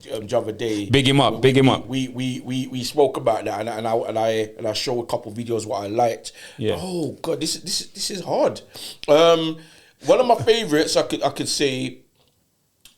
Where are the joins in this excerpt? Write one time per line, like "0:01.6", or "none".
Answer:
none